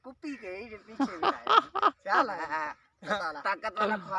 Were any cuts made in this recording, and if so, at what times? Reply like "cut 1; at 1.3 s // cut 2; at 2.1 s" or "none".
cut 1; at 3.2 s